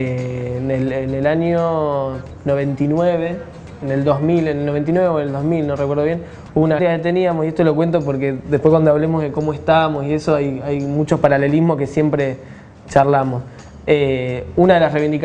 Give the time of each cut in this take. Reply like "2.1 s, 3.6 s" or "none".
none